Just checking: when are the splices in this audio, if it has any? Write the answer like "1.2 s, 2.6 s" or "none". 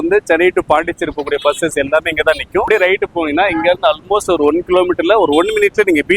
2.7 s